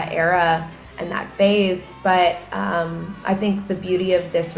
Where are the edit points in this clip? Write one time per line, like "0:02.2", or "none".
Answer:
none